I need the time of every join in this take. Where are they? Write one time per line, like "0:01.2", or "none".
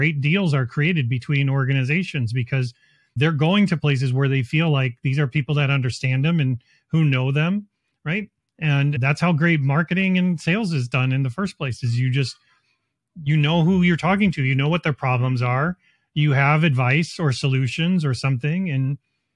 0:09.0